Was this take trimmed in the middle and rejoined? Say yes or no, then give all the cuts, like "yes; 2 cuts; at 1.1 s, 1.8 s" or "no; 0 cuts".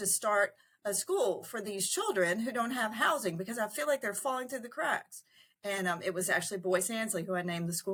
no; 0 cuts